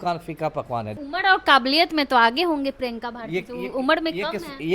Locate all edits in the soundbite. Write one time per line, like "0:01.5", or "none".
0:01.0